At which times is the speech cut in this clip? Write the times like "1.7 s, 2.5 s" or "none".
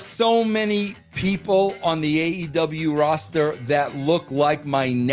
none